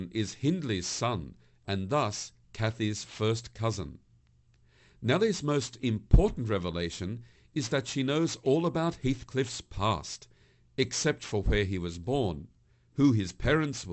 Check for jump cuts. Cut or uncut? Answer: uncut